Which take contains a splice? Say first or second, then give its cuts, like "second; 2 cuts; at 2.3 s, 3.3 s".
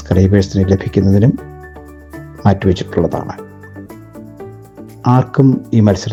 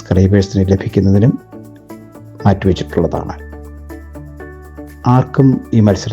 second; 2 cuts; at 3.6 s, 5.0 s